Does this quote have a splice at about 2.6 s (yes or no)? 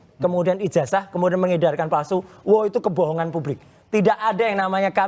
no